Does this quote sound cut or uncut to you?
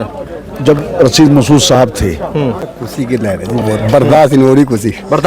cut